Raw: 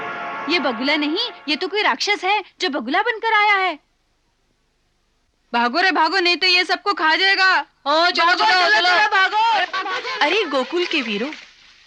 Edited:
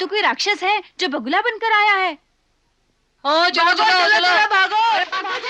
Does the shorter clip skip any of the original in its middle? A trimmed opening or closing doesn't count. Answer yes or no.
yes